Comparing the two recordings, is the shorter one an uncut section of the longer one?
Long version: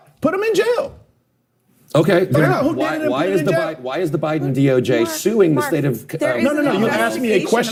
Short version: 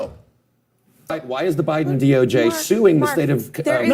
no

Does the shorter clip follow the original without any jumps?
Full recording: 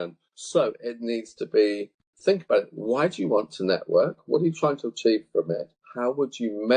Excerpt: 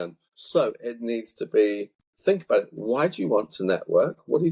yes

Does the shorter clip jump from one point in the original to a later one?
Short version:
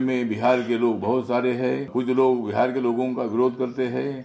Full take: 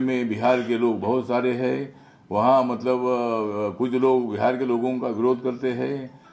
yes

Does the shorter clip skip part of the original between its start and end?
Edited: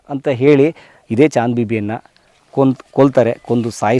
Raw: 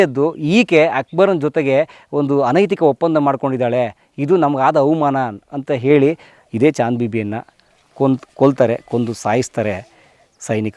no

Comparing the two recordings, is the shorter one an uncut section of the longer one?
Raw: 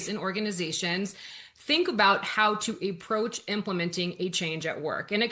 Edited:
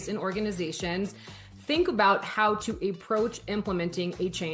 yes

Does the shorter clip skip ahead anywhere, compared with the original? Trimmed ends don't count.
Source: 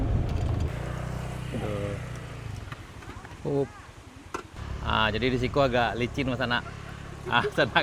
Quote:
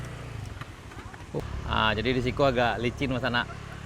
yes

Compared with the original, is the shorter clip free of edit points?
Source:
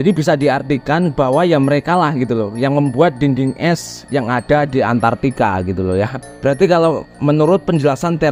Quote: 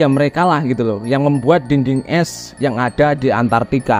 yes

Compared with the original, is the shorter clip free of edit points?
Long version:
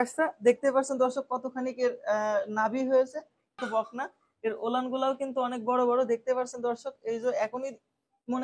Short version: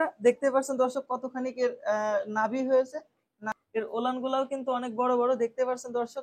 no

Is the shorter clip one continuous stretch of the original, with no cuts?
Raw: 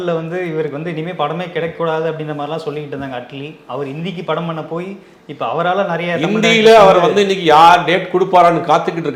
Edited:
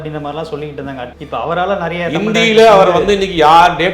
no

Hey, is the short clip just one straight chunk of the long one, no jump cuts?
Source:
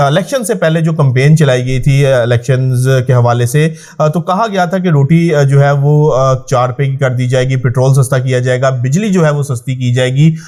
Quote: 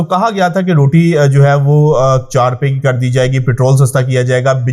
yes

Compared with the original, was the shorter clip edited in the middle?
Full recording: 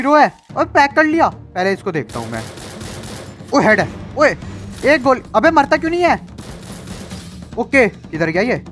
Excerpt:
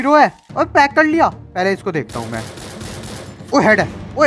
no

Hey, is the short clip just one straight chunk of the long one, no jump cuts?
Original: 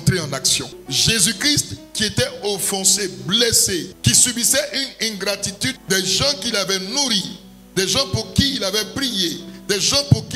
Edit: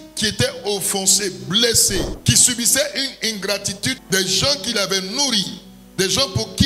yes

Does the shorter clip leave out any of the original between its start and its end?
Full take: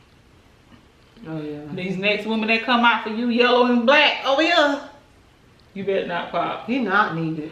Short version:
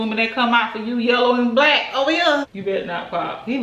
yes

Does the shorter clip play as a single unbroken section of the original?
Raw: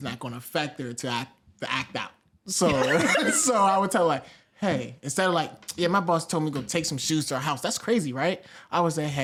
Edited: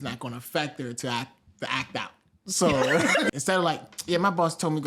no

